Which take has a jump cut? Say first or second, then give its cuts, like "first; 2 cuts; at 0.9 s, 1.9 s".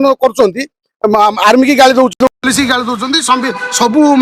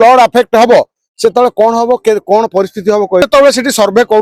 second; 1 cut; at 3.2 s